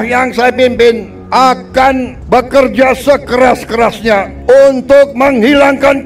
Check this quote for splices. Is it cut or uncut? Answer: cut